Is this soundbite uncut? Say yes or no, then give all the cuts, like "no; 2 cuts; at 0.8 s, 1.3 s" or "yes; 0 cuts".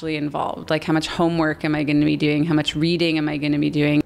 yes; 0 cuts